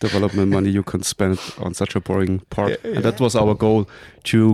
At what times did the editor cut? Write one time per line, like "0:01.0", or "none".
0:02.8